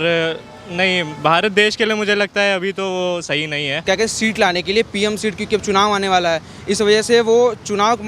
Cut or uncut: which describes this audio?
cut